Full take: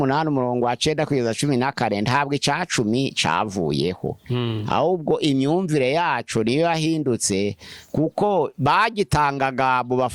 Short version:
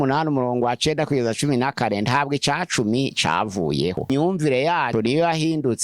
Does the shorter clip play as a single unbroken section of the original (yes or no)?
no